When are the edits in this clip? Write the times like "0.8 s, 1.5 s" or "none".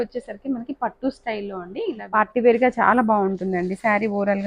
2.0 s